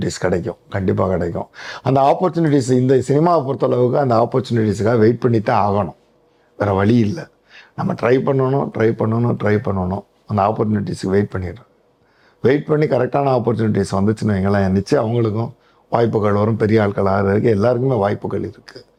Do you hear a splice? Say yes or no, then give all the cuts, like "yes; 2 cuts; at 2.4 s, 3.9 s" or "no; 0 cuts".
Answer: no; 0 cuts